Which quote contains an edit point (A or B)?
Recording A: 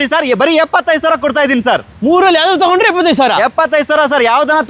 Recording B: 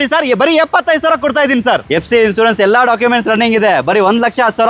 B